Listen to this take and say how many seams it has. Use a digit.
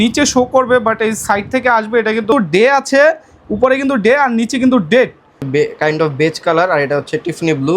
2